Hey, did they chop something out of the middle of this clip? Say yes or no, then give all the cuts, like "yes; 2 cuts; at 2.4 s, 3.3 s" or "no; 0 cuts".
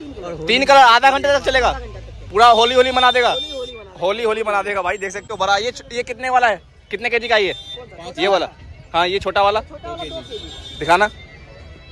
no; 0 cuts